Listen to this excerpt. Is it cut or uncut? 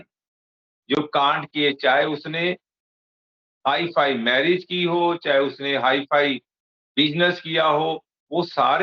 uncut